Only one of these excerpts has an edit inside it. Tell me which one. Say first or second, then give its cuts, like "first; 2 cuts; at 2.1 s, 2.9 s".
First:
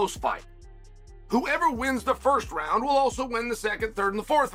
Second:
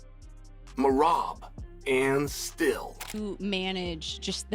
second; 1 cut; at 3.0 s